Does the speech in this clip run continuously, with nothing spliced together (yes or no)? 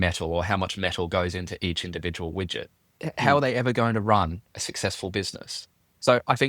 no